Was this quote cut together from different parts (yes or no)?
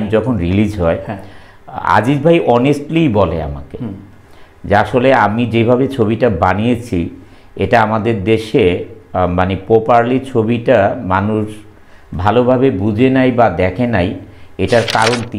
no